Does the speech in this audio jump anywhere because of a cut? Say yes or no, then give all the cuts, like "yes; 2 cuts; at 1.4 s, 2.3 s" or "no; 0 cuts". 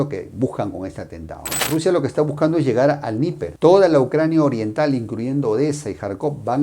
yes; 1 cut; at 1.6 s